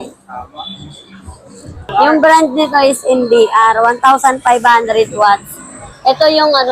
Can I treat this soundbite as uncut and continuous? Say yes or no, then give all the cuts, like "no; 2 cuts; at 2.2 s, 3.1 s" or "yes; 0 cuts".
no; 1 cut; at 1.9 s